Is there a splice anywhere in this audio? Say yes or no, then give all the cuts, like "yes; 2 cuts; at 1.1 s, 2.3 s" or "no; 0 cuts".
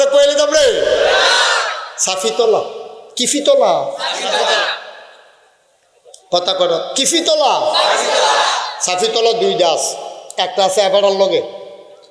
no; 0 cuts